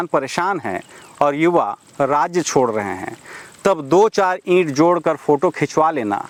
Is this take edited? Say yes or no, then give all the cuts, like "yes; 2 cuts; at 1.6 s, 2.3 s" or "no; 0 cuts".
no; 0 cuts